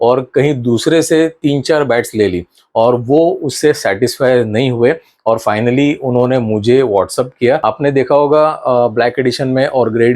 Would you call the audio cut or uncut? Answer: cut